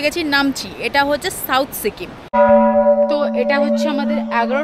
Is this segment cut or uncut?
cut